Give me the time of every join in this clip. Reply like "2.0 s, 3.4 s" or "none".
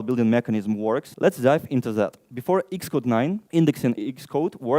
1.1 s, 2.3 s, 3.4 s, 4.0 s

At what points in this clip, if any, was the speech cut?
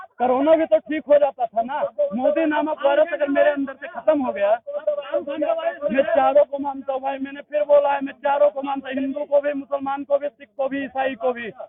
none

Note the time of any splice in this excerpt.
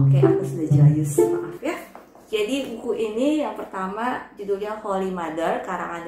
none

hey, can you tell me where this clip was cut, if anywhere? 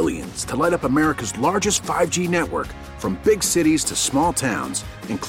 none

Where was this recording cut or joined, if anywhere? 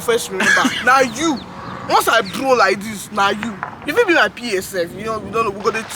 none

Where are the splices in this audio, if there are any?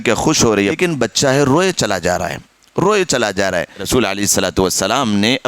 0.8 s, 3.9 s

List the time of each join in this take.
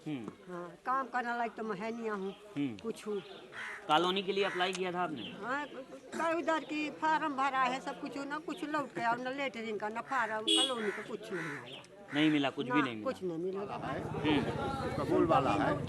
13.9 s

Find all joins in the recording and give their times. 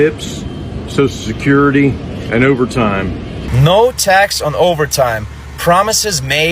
3.4 s

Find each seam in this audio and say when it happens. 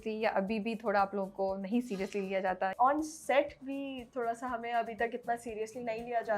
2.7 s

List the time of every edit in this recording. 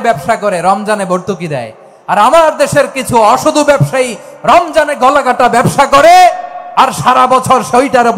none

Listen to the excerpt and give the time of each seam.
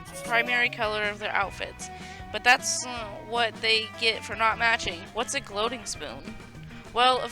5.0 s

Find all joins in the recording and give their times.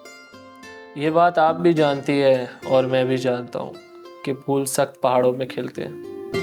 none

